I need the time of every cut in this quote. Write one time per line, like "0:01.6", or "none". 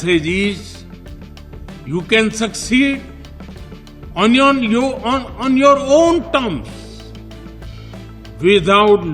0:06.7
0:08.2